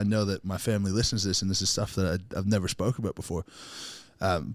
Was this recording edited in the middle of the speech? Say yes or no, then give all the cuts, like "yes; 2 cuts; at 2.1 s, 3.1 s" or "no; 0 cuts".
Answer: no; 0 cuts